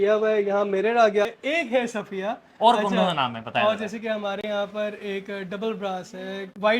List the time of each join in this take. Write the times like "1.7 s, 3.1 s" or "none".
1.4 s